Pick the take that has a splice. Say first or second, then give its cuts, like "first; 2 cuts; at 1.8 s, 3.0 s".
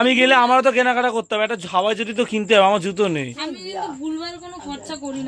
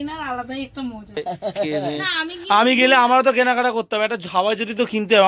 second; 1 cut; at 1.2 s